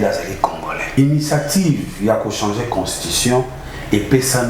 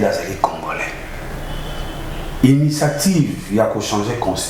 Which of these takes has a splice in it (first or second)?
first